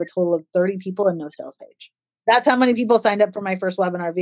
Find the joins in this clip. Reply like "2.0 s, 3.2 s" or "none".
2.1 s